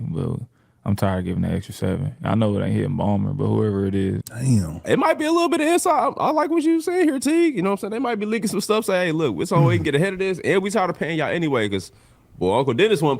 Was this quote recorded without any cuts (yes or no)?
no